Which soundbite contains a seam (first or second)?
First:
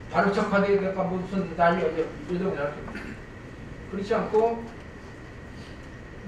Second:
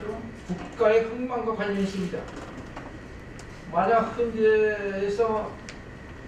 second